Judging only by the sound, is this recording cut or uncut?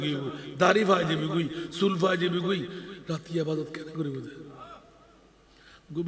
uncut